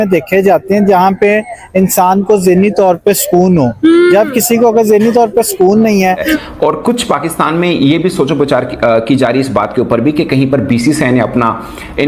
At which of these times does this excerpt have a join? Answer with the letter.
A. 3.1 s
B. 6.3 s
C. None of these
B